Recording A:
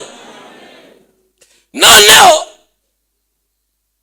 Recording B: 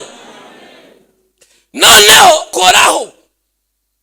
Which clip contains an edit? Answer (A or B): B